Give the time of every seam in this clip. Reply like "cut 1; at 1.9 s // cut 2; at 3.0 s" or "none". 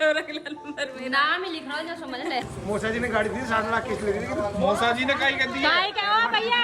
cut 1; at 2.5 s